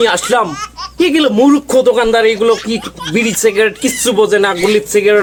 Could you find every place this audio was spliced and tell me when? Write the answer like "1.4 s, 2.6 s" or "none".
none